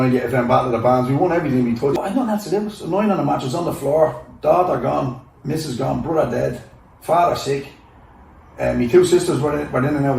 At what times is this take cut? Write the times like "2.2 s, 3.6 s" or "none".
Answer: 2.0 s